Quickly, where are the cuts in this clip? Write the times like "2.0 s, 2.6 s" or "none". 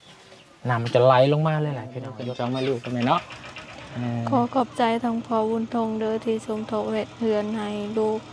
2.1 s

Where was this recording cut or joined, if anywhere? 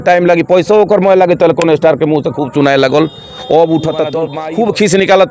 4.3 s

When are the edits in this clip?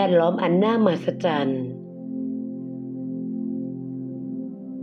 1.4 s

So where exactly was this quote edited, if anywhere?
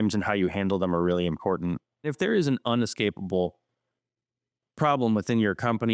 2.1 s

